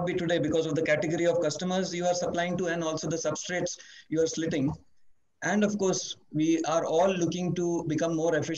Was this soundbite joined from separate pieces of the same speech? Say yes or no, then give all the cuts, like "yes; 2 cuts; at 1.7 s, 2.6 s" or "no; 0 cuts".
no; 0 cuts